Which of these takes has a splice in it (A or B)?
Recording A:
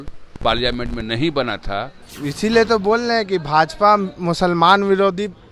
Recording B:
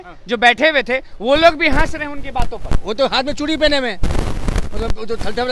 A